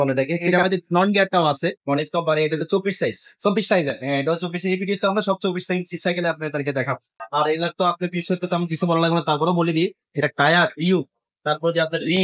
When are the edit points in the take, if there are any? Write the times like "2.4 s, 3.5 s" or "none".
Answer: 1.8 s, 7.1 s